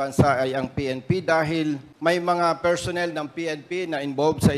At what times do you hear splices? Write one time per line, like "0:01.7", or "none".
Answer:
0:01.9